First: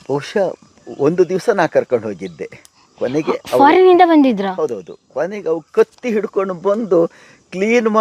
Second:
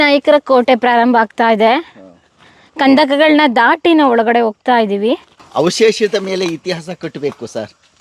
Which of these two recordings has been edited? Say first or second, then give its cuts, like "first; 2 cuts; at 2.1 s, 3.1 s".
second; 1 cut; at 5.4 s